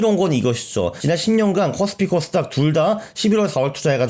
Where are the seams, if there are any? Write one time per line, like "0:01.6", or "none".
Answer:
0:01.0

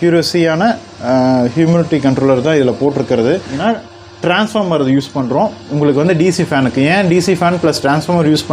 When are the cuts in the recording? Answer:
0:03.6

